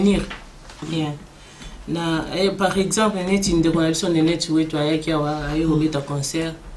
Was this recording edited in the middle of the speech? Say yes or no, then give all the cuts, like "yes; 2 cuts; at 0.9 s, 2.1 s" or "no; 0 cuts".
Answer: no; 0 cuts